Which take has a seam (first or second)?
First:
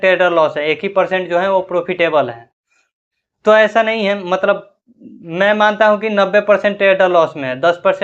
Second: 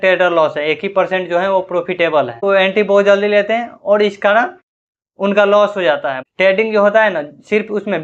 second